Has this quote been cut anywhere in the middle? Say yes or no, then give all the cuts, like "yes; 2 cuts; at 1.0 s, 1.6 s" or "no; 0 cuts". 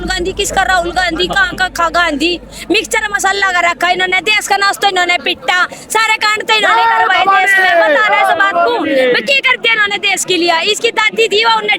no; 0 cuts